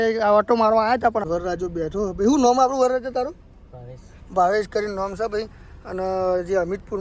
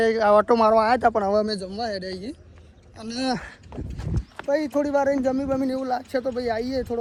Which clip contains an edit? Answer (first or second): first